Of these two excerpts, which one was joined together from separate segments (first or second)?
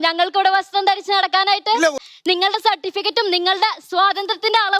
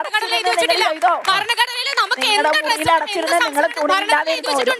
first